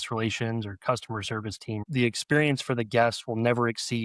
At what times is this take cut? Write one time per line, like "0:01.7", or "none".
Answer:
0:01.8